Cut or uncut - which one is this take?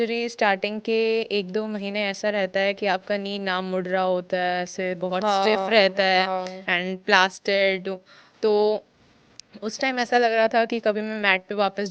uncut